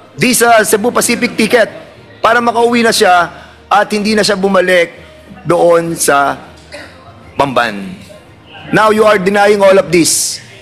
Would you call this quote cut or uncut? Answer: uncut